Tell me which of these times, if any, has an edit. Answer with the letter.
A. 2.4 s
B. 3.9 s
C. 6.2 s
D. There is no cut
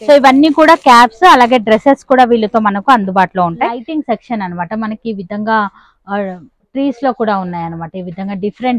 B